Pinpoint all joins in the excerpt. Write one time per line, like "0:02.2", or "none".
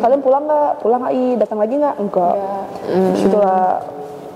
none